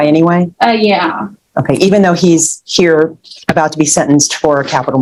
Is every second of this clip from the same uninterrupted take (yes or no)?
yes